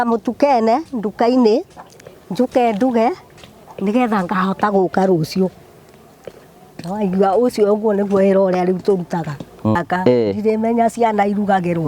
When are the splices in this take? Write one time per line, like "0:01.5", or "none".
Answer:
0:09.8